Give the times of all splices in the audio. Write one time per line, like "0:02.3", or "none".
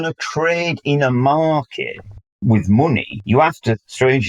0:02.4
0:03.1